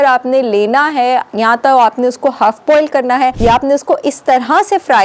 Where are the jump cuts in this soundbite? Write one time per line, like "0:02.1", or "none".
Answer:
0:03.4